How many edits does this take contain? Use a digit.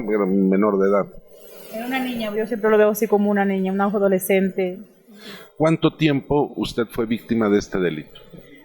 1